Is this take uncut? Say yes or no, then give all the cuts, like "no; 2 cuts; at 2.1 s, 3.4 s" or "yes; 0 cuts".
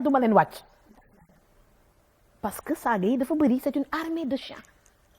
yes; 0 cuts